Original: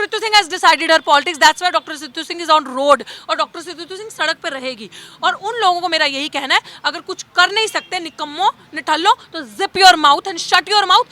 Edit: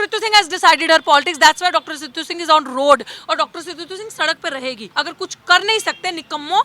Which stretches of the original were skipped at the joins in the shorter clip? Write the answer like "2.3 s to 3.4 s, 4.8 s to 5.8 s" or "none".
4.9 s to 6.8 s